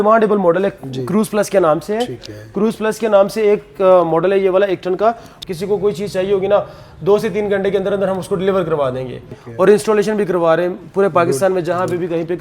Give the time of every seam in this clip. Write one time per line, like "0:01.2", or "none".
0:05.3
0:09.4

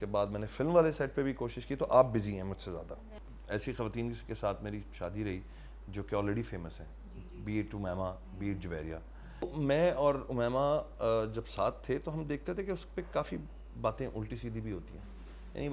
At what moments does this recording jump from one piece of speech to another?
0:03.0
0:09.5

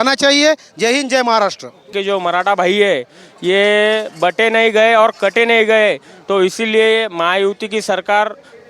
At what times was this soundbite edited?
0:01.9

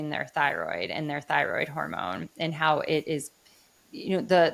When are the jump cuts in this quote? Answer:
none

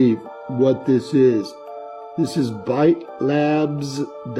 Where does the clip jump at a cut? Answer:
none

